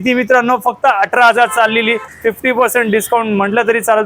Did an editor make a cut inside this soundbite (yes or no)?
yes